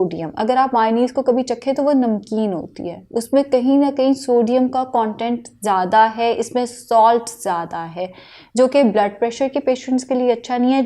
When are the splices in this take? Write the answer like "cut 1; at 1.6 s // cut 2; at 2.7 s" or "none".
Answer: none